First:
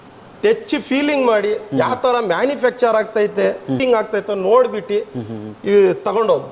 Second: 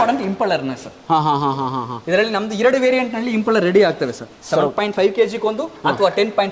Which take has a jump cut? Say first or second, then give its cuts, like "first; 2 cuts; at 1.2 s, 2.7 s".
first; 1 cut; at 3.8 s